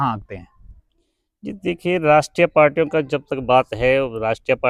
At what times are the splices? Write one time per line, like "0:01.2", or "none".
none